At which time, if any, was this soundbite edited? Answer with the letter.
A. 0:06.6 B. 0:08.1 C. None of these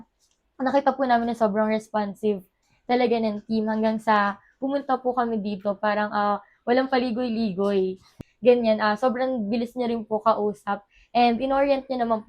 B